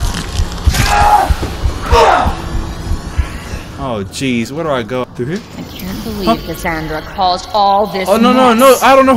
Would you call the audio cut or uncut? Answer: cut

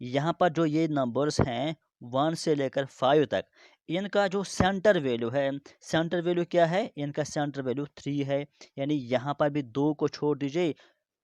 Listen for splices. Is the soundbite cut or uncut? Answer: uncut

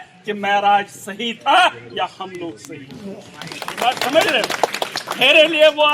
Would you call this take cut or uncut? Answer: cut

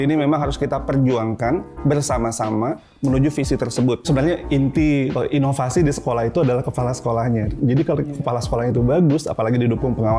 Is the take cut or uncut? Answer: cut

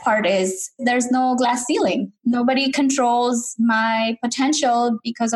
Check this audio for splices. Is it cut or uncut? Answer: cut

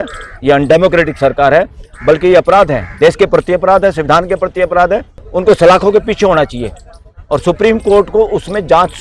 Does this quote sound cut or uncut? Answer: cut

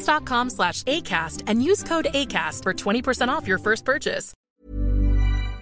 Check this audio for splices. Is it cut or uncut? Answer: cut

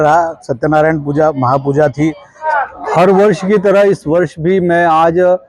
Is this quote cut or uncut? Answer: cut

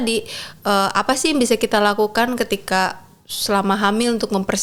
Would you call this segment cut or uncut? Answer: uncut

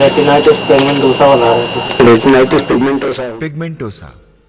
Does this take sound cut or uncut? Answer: cut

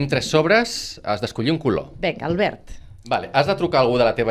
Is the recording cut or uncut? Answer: cut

